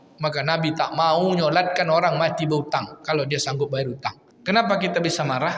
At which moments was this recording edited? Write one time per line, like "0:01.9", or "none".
0:04.3